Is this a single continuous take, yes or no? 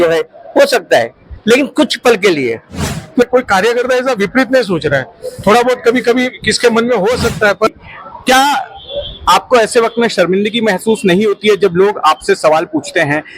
no